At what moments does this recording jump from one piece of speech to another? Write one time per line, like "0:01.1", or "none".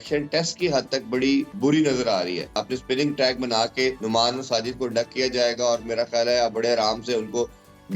0:01.5
0:02.6
0:04.0